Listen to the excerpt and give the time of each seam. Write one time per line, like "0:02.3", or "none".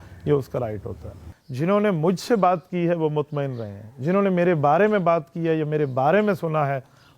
0:01.2